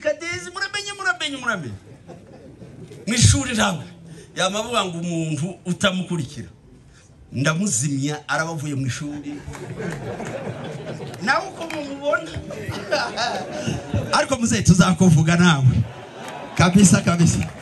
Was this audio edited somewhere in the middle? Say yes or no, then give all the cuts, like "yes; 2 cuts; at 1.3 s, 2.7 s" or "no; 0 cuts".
no; 0 cuts